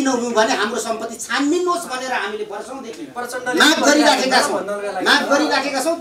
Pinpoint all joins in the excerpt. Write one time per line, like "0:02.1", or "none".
none

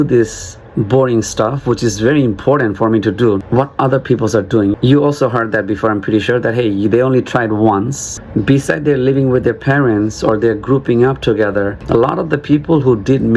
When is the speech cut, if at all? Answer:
0:03.4
0:04.7
0:08.1
0:11.8

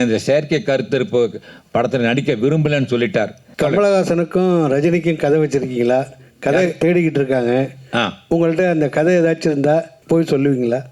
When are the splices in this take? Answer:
0:03.4
0:10.0

